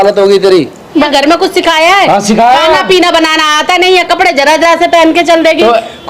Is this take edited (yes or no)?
yes